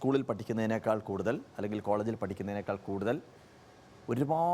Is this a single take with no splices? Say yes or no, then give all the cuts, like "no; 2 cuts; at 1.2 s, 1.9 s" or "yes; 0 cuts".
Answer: yes; 0 cuts